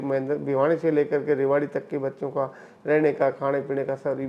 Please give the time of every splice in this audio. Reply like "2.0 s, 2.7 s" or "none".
none